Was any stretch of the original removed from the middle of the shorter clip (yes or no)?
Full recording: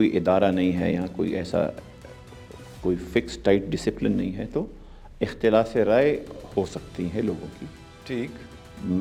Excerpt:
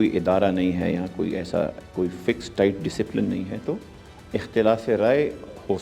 yes